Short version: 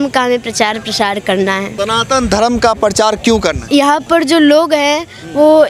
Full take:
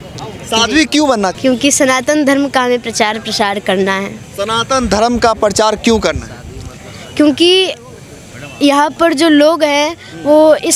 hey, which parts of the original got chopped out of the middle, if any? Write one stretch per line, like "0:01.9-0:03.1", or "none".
0:04.1-0:04.3
0:06.2-0:08.5